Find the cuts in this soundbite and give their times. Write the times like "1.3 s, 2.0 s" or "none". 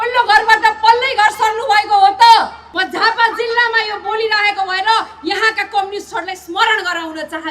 2.6 s

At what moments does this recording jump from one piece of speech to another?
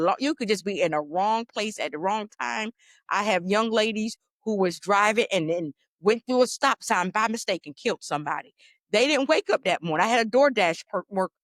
none

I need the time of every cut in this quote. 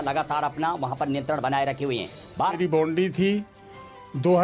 2.5 s

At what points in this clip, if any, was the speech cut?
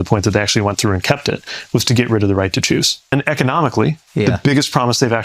3.1 s

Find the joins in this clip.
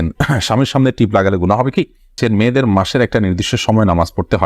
2.1 s

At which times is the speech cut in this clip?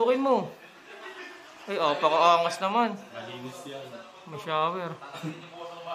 none

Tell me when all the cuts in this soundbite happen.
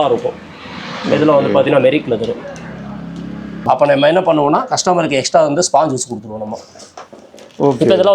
3.6 s

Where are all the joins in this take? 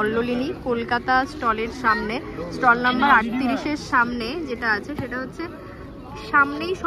none

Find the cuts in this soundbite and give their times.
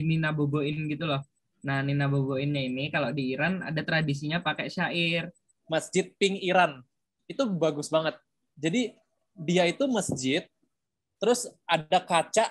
5.5 s

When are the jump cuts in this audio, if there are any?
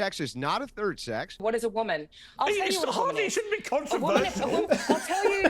1.4 s

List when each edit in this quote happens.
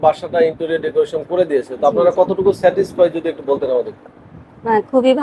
none

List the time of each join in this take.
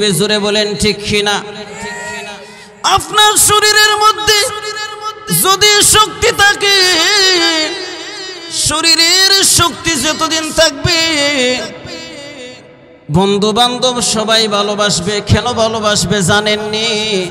none

